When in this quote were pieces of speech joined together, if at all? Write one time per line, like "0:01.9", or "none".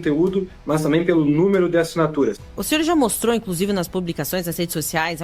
0:02.4